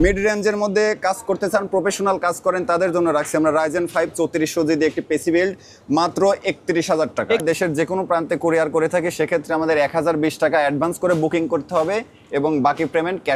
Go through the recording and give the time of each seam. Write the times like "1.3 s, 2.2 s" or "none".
7.4 s

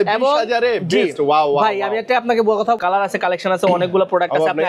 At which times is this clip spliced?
2.8 s

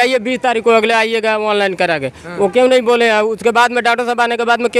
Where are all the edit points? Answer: none

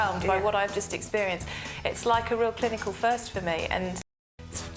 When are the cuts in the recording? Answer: none

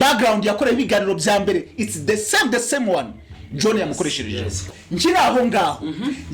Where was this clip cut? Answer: 4.7 s

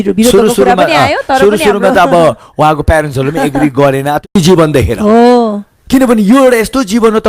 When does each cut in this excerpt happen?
4.2 s

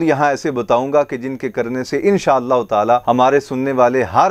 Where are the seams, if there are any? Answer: 3.0 s

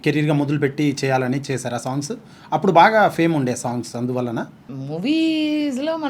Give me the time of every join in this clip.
none

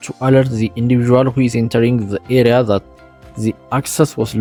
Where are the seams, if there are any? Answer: none

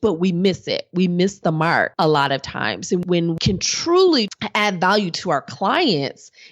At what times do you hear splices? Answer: 1.9 s, 3.0 s, 4.3 s

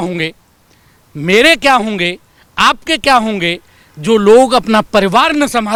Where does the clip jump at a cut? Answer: none

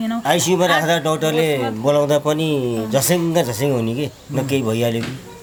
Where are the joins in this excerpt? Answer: none

